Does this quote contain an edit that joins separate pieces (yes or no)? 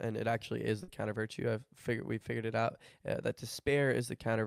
no